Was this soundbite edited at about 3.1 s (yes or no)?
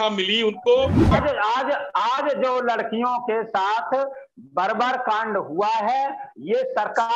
no